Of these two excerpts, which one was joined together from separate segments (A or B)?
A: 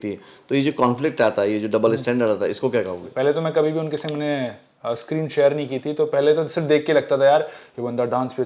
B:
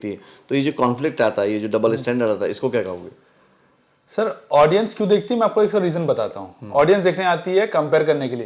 A